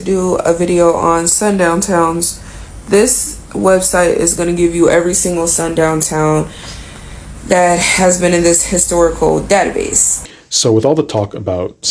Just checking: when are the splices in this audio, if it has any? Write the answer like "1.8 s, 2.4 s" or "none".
10.3 s

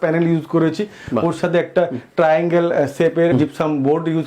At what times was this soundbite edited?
3.3 s

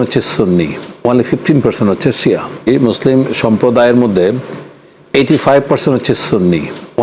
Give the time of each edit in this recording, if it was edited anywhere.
2.7 s

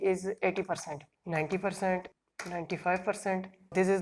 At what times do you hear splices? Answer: 1.2 s, 2.2 s

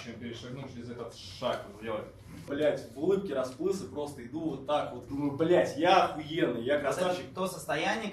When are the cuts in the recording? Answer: 2.5 s, 5.0 s

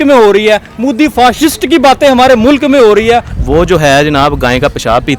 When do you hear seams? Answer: 3.3 s

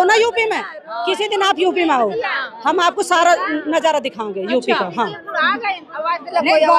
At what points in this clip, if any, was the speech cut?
none

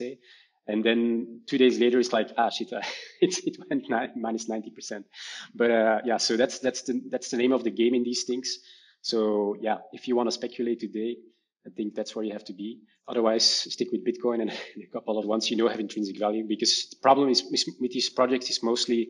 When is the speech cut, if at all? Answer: 12.9 s, 15.2 s

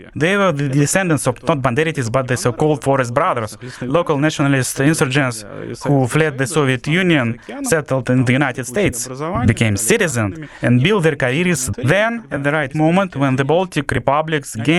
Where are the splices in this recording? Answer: none

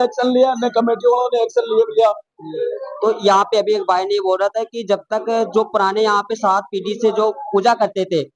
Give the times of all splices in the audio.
none

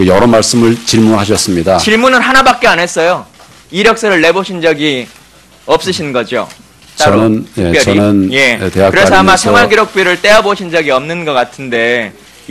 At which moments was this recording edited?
8.0 s

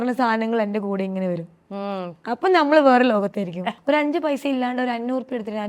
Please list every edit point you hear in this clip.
3.6 s

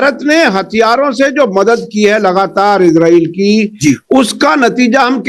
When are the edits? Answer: none

